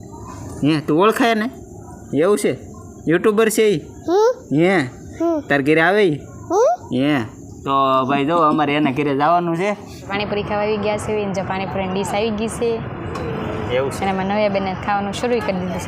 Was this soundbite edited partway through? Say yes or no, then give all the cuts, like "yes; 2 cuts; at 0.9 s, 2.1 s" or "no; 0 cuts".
yes; 1 cut; at 10.1 s